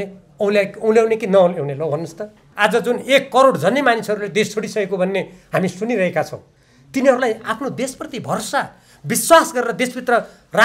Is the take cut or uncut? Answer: cut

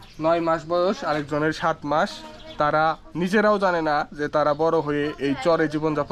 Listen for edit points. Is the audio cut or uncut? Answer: uncut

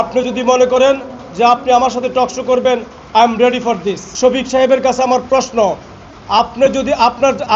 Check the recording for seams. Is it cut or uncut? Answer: cut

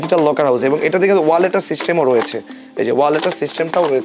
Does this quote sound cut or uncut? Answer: uncut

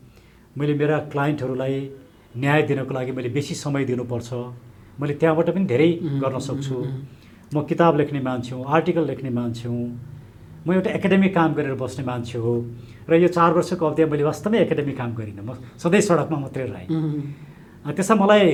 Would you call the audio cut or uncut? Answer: uncut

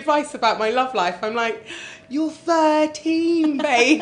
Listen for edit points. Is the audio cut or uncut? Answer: uncut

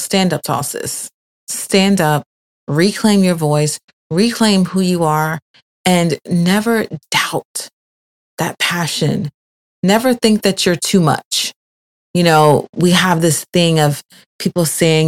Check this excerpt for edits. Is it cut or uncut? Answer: uncut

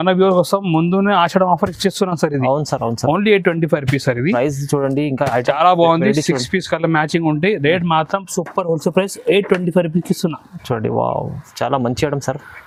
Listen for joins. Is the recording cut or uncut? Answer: uncut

